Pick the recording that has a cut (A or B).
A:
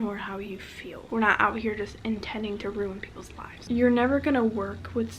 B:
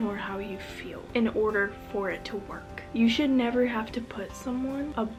A